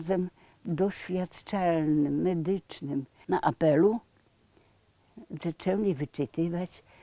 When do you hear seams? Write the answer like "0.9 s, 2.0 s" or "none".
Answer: 3.1 s